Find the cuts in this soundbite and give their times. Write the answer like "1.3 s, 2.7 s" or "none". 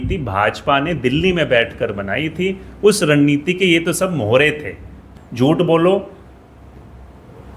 5.1 s